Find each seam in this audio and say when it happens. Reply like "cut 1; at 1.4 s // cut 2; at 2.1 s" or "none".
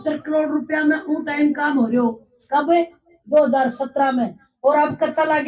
none